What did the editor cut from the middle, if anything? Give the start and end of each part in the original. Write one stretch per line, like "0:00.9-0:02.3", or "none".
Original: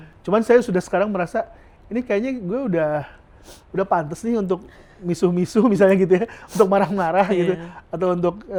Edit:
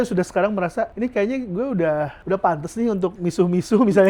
0:01.5-0:01.9
0:03.1-0:03.6
0:04.6-0:05.0